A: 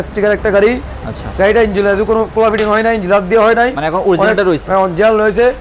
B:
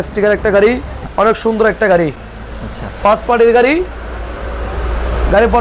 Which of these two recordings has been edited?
B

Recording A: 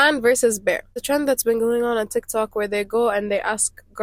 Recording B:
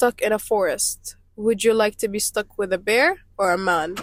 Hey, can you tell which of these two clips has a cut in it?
A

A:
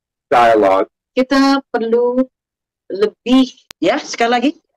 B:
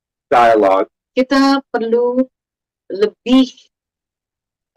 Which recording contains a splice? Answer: A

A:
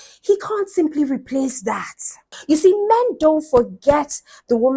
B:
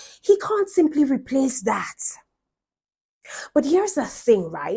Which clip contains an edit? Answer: A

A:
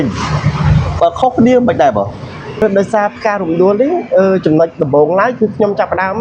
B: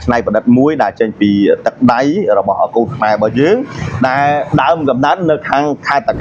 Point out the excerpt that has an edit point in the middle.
A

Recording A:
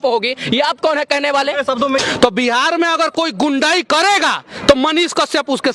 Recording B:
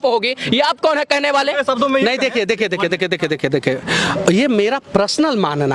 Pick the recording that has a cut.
A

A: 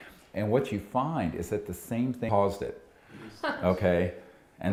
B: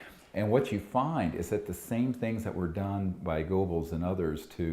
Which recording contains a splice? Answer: B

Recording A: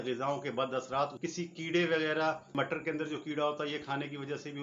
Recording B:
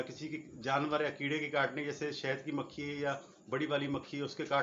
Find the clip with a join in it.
A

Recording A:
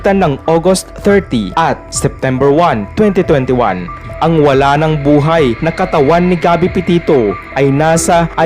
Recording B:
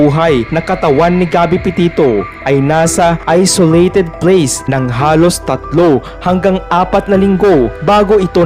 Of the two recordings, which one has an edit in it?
A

